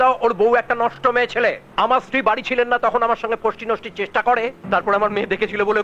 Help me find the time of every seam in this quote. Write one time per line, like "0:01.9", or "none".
0:01.6
0:04.6